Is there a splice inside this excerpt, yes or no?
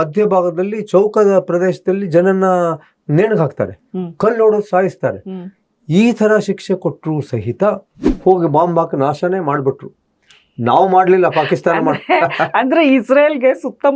yes